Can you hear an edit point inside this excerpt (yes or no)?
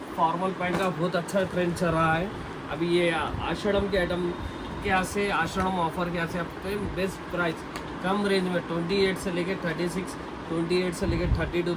no